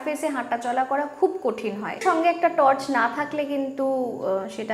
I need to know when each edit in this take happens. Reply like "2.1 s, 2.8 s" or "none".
2.0 s